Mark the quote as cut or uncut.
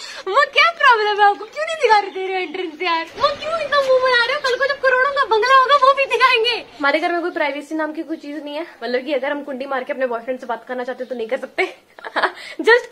cut